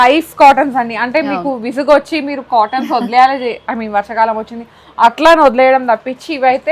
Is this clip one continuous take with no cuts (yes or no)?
yes